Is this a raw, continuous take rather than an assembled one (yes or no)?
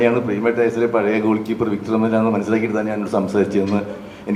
yes